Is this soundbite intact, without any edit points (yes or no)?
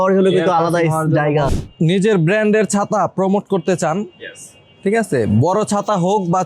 no